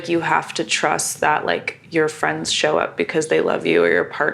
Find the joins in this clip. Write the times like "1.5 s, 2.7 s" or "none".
none